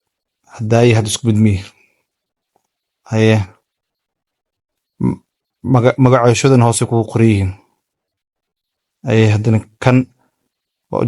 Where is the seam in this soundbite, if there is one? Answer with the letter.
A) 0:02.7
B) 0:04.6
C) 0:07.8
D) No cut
D